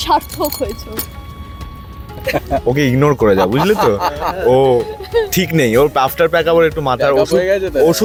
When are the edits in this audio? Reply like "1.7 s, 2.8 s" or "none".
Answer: none